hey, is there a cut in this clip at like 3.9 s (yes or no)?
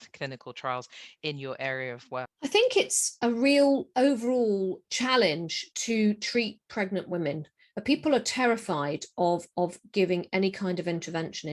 no